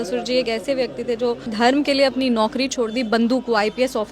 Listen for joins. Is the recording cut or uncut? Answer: cut